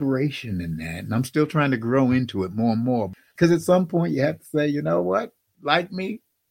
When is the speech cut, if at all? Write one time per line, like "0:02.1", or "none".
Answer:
0:03.3
0:05.4